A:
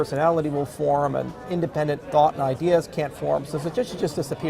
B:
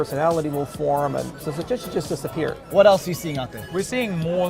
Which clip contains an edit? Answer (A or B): B